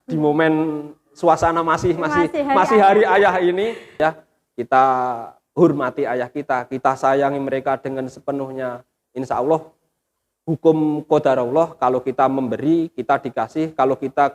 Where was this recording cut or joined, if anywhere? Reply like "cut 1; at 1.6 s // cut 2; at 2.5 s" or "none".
cut 1; at 4.0 s